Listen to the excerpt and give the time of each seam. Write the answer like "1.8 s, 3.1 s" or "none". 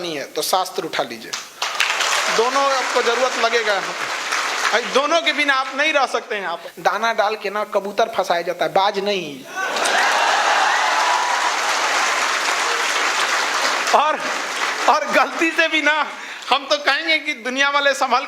6.7 s